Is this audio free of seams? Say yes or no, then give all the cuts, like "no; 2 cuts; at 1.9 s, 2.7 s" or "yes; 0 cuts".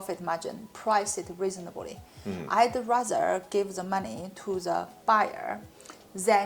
yes; 0 cuts